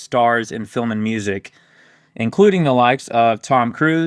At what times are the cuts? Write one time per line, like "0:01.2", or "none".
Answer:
none

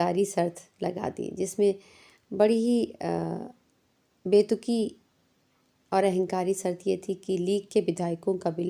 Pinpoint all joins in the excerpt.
none

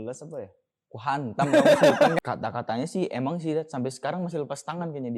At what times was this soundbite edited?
0:02.1

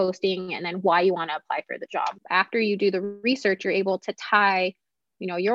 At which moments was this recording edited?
0:02.2

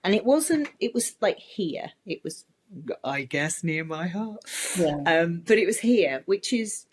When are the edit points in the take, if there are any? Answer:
none

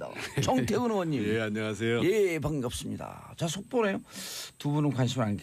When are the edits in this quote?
none

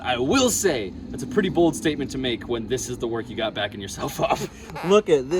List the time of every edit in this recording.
0:04.5

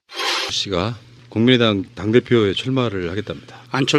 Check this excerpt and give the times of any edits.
none

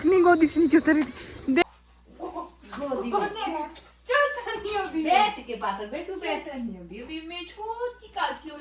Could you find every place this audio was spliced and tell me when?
0:01.6

